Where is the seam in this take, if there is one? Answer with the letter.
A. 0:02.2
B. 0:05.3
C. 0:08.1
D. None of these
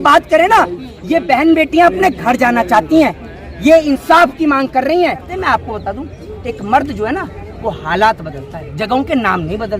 B